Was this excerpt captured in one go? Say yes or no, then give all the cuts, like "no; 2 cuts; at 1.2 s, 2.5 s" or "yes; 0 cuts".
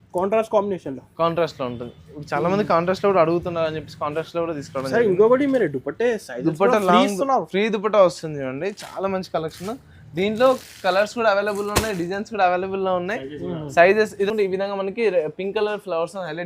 no; 1 cut; at 14.3 s